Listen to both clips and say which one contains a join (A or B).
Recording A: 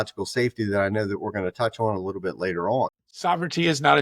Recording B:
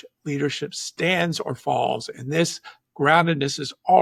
A